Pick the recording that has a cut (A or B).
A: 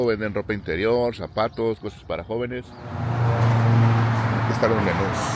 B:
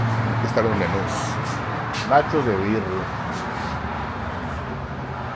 A